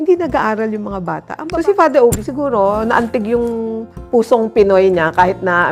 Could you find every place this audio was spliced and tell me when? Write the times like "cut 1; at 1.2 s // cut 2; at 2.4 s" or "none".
cut 1; at 1.3 s